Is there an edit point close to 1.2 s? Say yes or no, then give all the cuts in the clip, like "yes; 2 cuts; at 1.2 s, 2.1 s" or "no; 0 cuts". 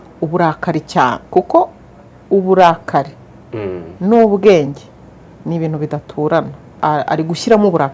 yes; 2 cuts; at 1.2 s, 6.8 s